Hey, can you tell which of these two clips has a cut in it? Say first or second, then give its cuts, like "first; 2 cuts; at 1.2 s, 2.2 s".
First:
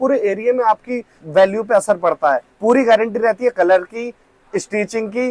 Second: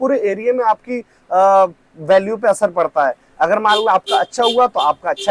first; 2 cuts; at 1.1 s, 2.5 s